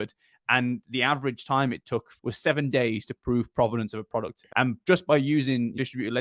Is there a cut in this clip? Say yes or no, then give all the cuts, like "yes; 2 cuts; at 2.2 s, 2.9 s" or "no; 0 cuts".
yes; 2 cuts; at 2.1 s, 4.4 s